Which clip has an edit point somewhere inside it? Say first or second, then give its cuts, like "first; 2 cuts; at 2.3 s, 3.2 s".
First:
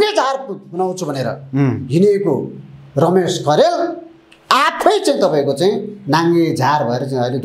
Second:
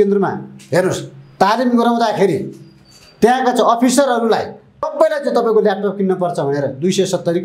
second; 1 cut; at 4.9 s